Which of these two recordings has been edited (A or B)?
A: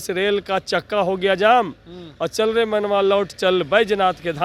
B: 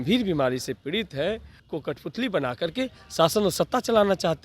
B